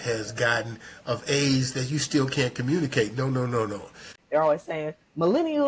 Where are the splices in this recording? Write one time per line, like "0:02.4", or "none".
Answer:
0:04.1